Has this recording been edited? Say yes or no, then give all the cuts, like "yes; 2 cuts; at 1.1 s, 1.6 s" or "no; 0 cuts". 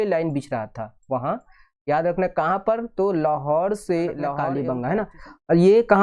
yes; 1 cut; at 4.5 s